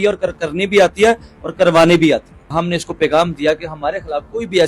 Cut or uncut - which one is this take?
cut